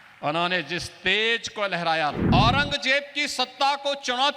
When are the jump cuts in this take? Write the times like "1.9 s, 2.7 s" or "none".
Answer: 2.2 s